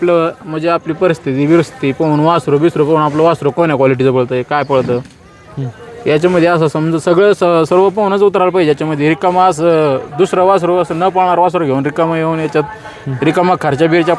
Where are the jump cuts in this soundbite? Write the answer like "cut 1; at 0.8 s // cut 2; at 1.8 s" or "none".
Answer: none